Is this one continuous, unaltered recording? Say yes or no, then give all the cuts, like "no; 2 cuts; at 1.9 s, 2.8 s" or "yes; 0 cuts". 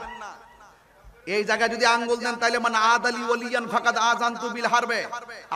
yes; 0 cuts